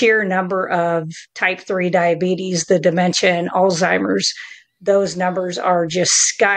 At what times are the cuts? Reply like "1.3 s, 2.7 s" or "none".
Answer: none